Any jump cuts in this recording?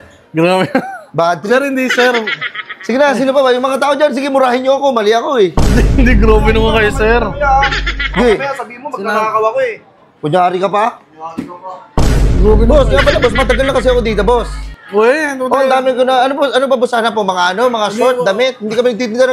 no; 0 cuts

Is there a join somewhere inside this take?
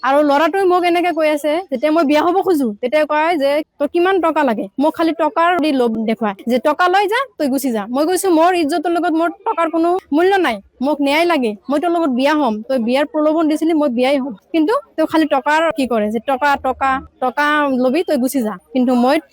no; 0 cuts

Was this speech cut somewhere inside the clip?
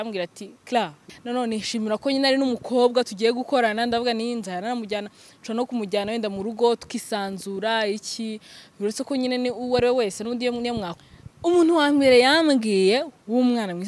yes; 2 cuts; at 1.0 s, 10.9 s

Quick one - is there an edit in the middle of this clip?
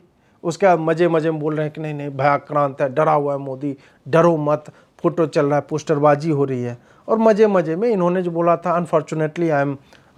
no; 0 cuts

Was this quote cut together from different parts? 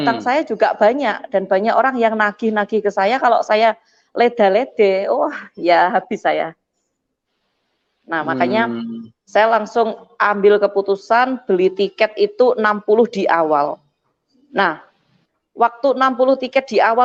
no; 0 cuts

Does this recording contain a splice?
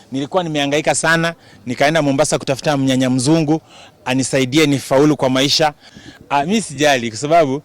yes; 1 cut; at 5.9 s

